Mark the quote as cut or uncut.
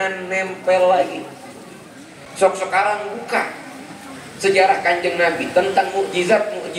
uncut